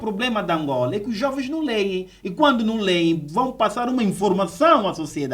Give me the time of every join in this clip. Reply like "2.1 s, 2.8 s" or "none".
none